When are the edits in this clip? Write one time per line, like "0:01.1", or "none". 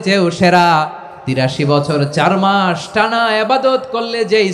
0:01.4